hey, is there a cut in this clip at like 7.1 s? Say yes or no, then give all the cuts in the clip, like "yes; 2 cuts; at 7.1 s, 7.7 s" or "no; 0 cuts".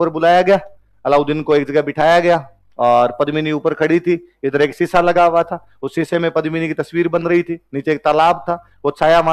no; 0 cuts